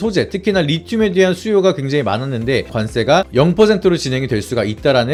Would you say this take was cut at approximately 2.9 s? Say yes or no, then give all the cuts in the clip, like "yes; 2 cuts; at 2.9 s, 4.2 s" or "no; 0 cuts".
no; 0 cuts